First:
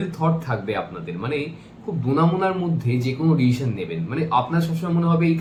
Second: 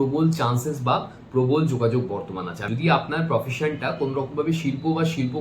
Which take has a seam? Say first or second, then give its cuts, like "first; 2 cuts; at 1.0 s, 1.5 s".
second; 1 cut; at 2.6 s